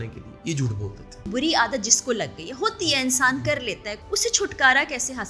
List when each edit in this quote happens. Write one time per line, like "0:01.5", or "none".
0:01.3
0:03.9